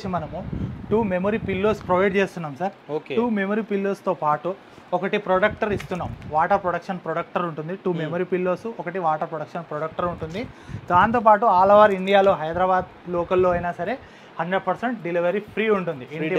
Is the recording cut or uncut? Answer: uncut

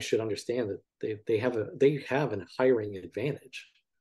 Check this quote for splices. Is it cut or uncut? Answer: uncut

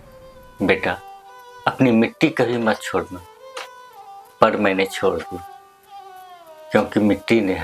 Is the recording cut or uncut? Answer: uncut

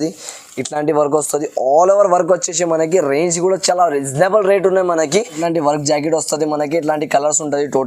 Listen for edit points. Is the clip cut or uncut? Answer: cut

